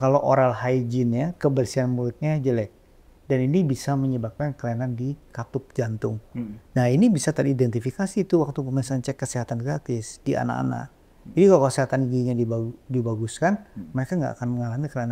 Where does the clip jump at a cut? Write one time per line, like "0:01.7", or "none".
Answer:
none